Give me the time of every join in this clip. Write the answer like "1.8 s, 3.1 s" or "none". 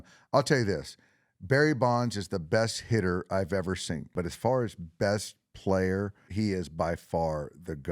4.1 s, 6.2 s